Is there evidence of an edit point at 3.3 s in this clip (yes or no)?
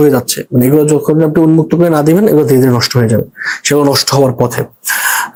no